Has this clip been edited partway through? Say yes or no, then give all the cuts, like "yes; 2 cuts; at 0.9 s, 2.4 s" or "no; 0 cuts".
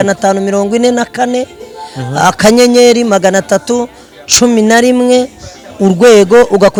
no; 0 cuts